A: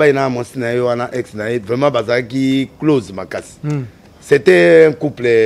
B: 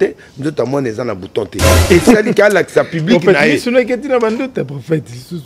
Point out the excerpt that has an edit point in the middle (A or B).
B